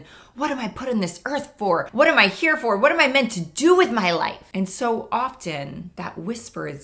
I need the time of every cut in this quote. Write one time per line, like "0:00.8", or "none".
0:01.9